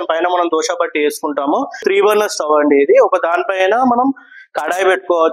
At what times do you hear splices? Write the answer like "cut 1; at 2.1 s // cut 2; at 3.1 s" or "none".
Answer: cut 1; at 1.8 s